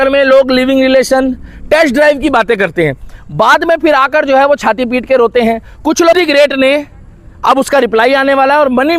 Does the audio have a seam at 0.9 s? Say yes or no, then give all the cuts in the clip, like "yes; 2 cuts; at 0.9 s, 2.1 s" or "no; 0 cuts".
no; 1 cut; at 6.1 s